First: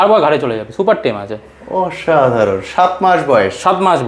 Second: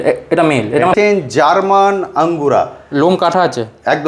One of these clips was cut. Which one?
second; 1 cut; at 0.9 s

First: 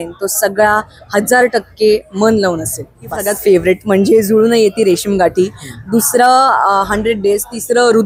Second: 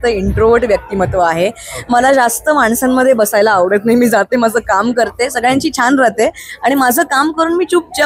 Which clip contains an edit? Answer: first; 1 cut; at 3.3 s

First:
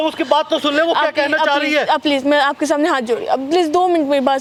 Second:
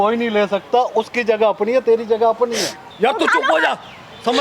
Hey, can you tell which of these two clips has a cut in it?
second; 1 cut; at 2.9 s

